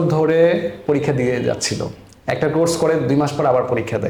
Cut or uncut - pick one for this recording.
uncut